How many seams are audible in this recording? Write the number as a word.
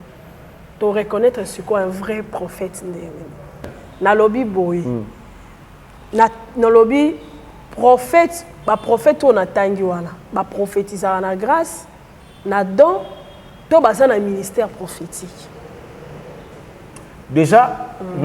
one